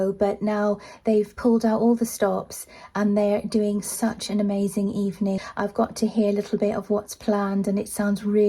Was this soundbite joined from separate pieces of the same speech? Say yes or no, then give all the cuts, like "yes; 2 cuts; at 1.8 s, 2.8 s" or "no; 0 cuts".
yes; 1 cut; at 5.4 s